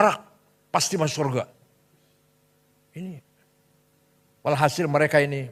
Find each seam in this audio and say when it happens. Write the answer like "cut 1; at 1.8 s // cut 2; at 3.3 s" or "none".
none